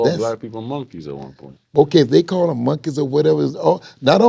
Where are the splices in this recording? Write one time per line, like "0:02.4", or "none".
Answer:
0:01.6